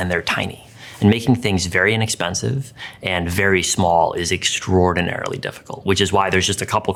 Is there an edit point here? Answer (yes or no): no